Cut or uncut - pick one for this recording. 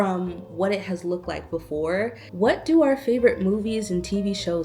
cut